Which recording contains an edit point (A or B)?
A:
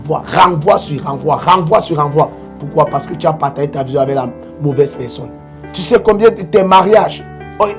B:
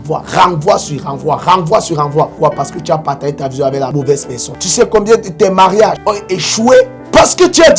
B